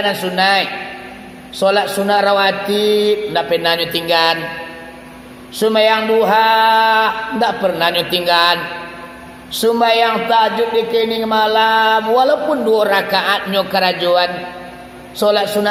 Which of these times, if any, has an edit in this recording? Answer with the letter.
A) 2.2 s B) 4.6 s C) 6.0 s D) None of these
D